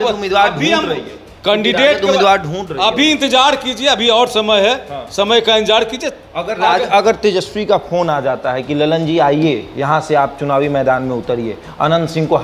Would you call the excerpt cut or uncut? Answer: uncut